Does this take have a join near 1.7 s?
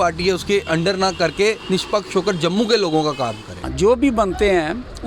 no; 1 cut; at 3.7 s

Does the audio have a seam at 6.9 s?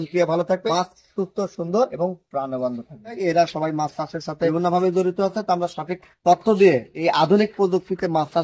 no; 3 cuts; at 0.7 s, 1.9 s, 3.2 s

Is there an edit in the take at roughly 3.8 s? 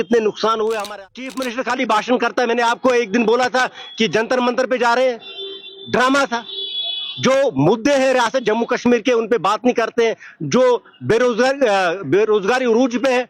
no; 1 cut; at 1.1 s

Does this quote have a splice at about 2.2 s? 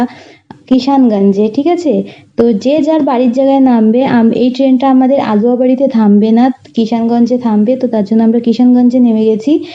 no; 0 cuts

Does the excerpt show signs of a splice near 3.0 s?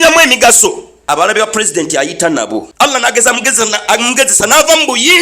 yes; 2 cuts; at 1.0 s, 3.0 s

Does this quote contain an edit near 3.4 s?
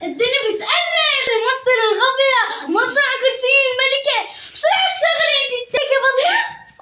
no; 2 cuts; at 1.3 s, 5.8 s

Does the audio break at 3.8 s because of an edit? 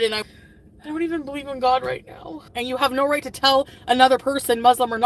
no; 1 cut; at 2.4 s

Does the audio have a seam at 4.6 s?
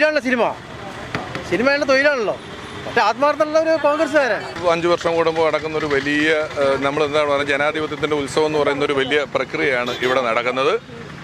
yes; 1 cut; at 4.6 s

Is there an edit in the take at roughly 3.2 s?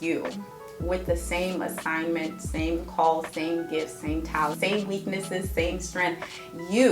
no; 1 cut; at 4.5 s

